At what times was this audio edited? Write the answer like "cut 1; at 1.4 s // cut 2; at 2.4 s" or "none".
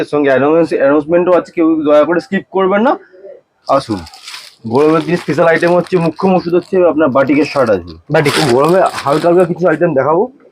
cut 1; at 8.3 s